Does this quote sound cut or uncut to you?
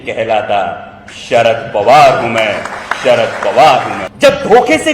cut